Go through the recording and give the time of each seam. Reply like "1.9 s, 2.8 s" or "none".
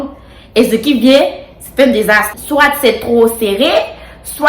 2.3 s